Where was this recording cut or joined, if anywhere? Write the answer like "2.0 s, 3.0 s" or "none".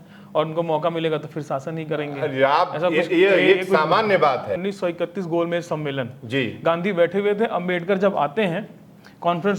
4.6 s